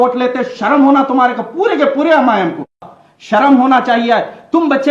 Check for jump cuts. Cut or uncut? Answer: cut